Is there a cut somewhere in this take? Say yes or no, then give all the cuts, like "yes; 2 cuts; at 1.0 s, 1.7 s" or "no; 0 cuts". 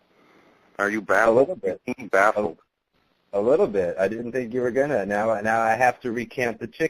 yes; 1 cut; at 4.2 s